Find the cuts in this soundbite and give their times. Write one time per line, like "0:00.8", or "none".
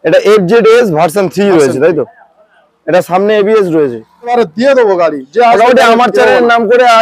0:04.3